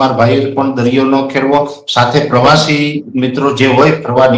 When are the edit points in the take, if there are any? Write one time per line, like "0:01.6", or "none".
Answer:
none